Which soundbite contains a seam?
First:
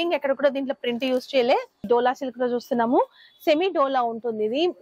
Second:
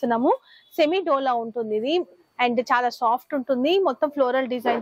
first; 1 cut; at 1.8 s

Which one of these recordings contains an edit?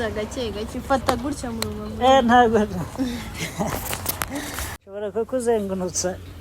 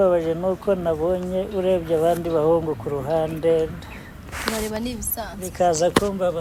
first; 1 cut; at 4.7 s

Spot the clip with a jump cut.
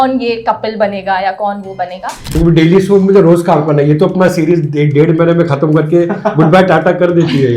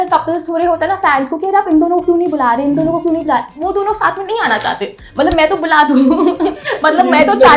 first; 1 cut; at 2.3 s

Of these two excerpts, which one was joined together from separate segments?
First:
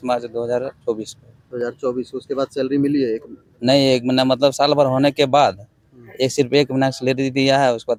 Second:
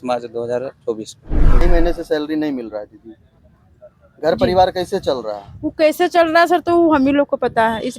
second; 1 cut; at 1.6 s

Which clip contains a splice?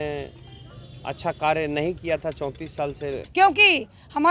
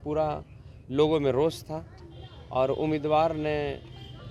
first; 1 cut; at 3.2 s

